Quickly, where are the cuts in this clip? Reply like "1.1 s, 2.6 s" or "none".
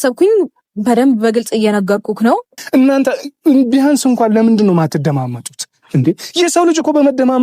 2.5 s